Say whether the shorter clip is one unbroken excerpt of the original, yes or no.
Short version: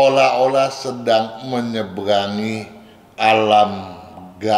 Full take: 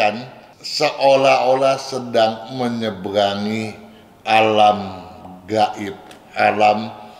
yes